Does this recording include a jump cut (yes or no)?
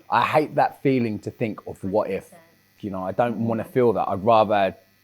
yes